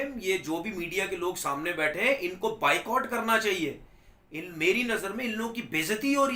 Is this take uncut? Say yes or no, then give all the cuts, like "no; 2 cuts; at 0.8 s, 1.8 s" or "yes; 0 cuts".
yes; 0 cuts